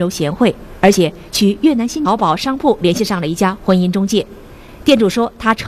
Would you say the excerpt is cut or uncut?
uncut